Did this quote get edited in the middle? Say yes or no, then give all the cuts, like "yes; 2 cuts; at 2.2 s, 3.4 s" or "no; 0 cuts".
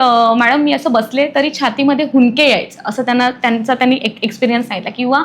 no; 0 cuts